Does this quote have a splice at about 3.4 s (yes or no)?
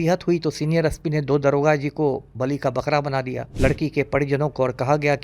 yes